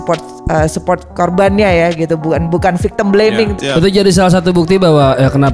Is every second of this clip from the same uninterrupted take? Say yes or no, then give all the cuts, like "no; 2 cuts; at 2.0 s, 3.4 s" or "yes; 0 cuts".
no; 1 cut; at 3.6 s